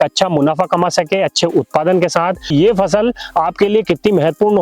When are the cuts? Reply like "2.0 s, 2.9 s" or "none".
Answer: 2.5 s